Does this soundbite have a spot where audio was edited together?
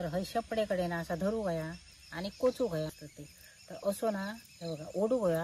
yes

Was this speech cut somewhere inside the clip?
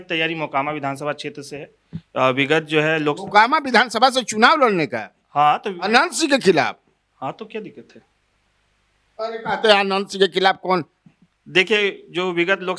no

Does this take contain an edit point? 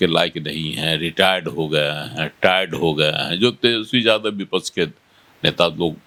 no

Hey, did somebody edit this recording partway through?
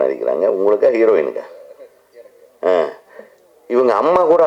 no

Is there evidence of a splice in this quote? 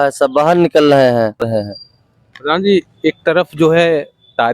yes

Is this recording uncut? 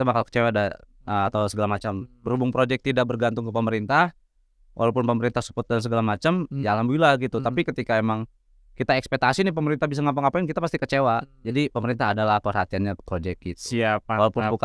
yes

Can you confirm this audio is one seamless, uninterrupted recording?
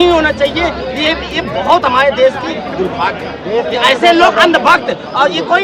yes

